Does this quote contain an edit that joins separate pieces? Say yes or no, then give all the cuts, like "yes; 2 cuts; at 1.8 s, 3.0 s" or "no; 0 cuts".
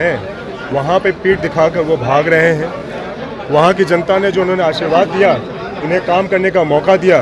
no; 0 cuts